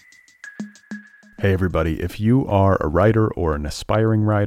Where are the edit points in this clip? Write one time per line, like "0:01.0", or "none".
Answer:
0:01.0